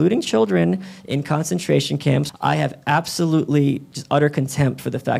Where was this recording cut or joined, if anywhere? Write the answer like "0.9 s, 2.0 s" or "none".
2.3 s, 3.9 s